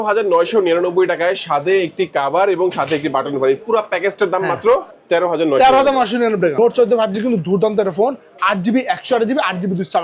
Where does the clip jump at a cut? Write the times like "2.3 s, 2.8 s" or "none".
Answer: 4.9 s, 6.5 s